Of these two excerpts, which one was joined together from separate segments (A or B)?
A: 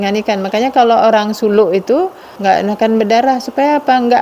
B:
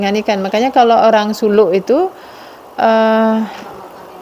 A